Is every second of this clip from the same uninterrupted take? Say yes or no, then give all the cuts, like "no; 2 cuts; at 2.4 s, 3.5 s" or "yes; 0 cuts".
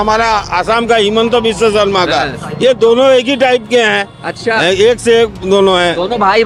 yes; 0 cuts